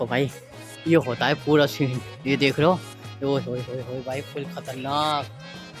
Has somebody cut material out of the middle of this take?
no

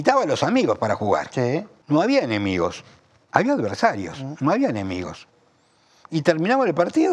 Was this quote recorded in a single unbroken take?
no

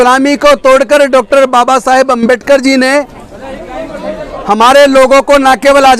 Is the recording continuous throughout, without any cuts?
yes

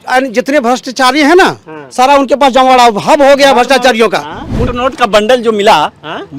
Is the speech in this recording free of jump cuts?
no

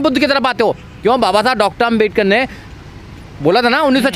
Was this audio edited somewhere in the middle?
no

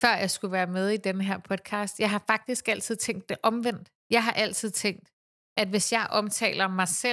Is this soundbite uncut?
yes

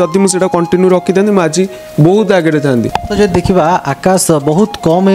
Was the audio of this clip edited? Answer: no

